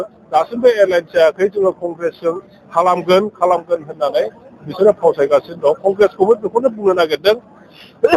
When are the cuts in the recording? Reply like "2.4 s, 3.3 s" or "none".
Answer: none